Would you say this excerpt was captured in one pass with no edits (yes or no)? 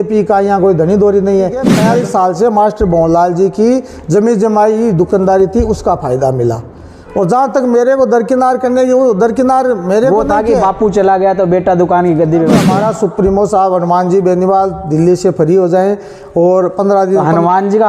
no